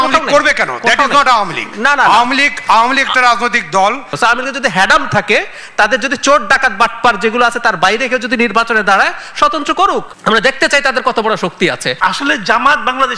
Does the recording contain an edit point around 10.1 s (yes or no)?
yes